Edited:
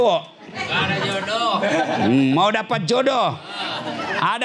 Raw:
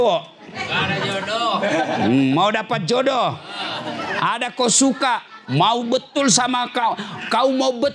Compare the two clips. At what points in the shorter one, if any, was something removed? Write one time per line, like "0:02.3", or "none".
none